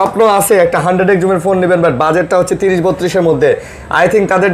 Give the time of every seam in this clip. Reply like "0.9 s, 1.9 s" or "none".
none